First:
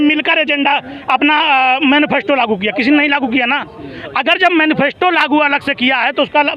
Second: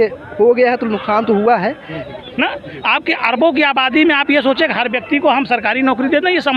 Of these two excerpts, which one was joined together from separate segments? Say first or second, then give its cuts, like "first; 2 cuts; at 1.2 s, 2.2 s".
second; 1 cut; at 2.1 s